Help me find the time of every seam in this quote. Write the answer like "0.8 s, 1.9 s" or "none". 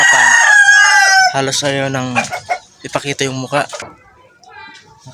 3.8 s